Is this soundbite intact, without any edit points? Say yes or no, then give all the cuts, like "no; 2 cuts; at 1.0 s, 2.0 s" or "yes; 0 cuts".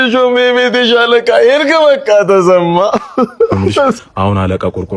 no; 1 cut; at 4.0 s